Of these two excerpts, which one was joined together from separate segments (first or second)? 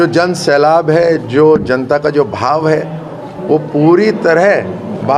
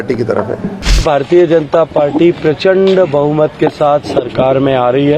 second